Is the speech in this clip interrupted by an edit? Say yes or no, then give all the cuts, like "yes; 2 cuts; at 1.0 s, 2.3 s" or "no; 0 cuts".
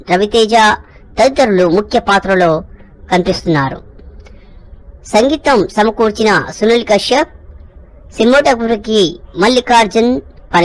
no; 0 cuts